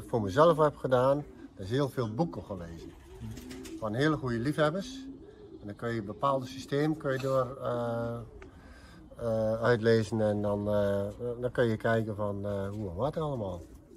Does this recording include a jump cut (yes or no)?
no